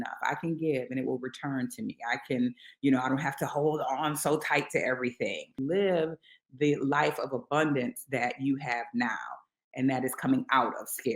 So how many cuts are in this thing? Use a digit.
1